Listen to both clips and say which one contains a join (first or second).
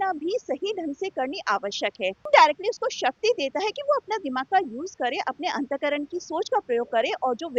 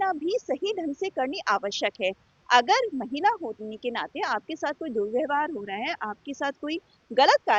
first